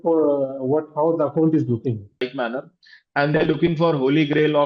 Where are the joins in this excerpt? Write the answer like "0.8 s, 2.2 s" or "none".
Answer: 2.3 s